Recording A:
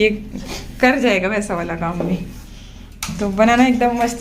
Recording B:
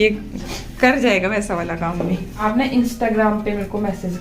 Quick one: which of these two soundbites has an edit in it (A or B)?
B